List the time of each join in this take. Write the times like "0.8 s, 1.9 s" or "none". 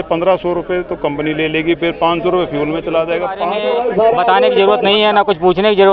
3.6 s